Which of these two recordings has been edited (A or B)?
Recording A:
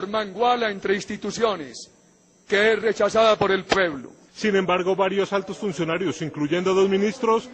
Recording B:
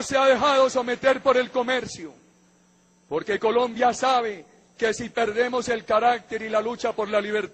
B